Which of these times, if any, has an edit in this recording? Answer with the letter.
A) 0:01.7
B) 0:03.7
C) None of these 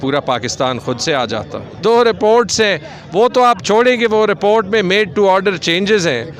A